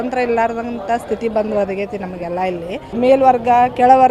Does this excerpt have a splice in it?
yes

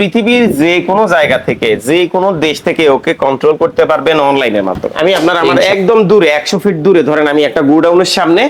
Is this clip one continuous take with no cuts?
no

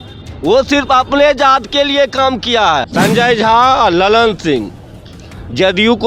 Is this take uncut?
no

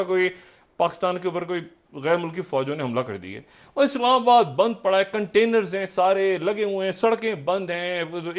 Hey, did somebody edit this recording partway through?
no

